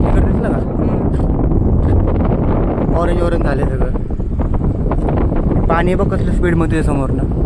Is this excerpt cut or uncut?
uncut